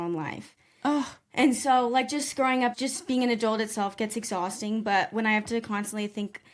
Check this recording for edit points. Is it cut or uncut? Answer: cut